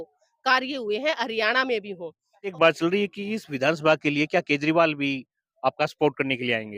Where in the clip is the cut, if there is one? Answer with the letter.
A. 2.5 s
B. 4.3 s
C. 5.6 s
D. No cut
A